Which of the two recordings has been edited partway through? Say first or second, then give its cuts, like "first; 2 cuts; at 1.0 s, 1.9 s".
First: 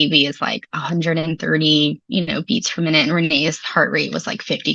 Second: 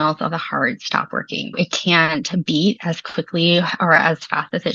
second; 2 cuts; at 1.6 s, 4.0 s